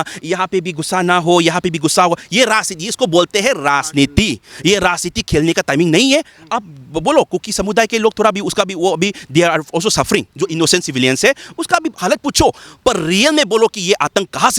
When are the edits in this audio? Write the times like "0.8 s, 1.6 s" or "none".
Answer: none